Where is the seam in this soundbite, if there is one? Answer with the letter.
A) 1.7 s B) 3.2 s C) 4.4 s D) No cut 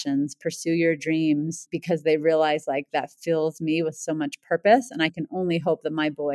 A